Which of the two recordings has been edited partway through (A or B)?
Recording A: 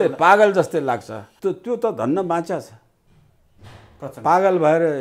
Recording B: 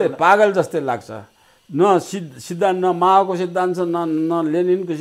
A